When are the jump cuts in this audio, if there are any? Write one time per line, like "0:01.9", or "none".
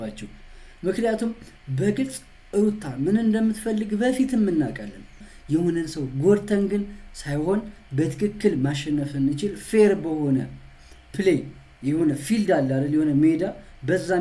0:05.2